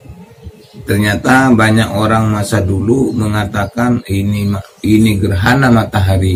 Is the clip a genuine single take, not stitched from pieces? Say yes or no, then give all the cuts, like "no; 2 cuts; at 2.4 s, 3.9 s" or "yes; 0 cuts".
yes; 0 cuts